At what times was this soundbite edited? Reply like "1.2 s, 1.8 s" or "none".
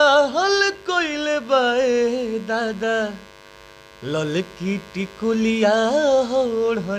none